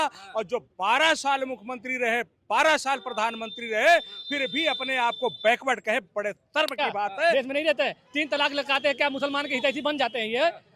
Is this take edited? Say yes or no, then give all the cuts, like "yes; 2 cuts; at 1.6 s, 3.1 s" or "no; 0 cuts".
yes; 1 cut; at 7.3 s